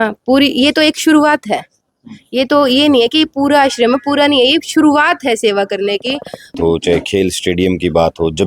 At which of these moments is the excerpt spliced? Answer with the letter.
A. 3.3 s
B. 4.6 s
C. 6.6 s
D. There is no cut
C